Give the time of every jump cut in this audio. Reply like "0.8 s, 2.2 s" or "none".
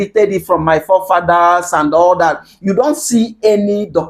none